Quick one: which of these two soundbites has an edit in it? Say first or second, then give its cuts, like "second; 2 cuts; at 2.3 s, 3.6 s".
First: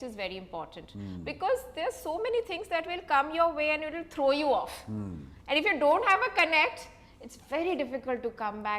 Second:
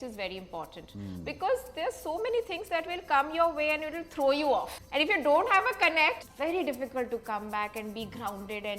second; 2 cuts; at 4.8 s, 6.3 s